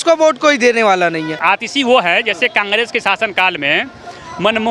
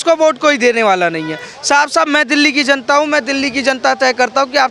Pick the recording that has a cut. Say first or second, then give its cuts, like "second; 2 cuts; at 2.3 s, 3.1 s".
first; 1 cut; at 1.3 s